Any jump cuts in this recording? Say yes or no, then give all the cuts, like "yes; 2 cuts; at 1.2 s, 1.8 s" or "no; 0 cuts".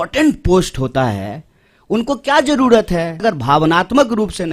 yes; 1 cut; at 3.2 s